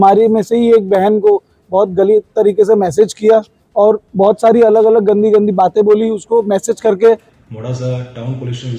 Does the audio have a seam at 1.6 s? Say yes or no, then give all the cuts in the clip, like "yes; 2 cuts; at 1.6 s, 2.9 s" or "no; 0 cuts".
no; 1 cut; at 7.4 s